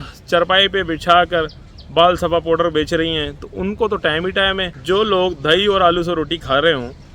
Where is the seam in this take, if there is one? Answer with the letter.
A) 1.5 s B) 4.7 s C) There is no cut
B